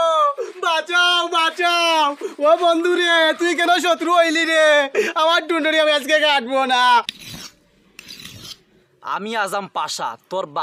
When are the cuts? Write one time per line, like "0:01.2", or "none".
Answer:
none

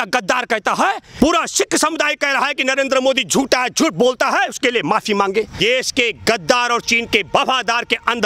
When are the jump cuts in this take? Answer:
0:01.1
0:05.5

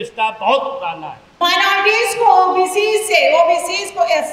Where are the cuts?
0:01.3

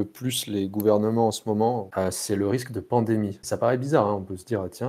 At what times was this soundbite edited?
0:01.9
0:03.4

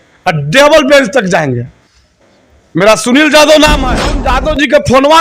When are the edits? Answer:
0:04.1

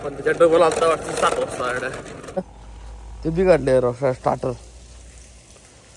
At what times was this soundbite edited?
0:02.4

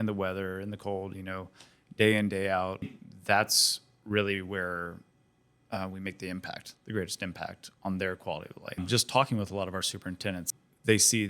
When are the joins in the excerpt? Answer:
0:03.0
0:08.8
0:10.4

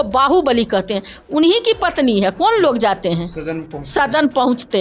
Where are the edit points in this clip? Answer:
none

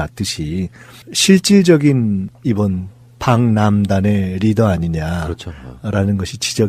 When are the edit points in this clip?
none

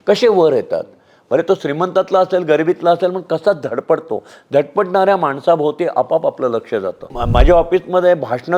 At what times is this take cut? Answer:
0:07.1

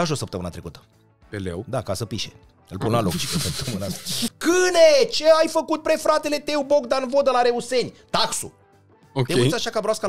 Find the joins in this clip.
0:04.3

